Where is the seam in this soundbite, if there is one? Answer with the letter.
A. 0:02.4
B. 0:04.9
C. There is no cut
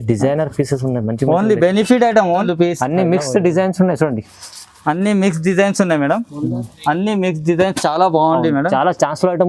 A